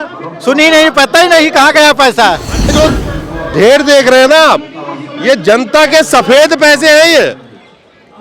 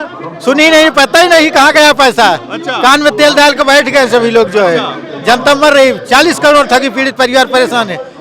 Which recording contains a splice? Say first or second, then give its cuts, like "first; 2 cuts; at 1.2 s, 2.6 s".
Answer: first; 1 cut; at 2.7 s